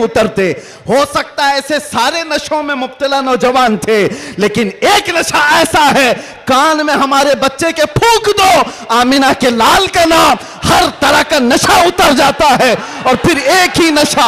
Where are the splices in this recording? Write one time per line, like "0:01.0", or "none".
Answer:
none